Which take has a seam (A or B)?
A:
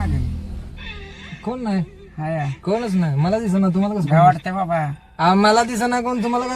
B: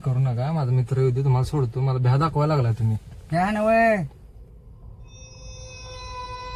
A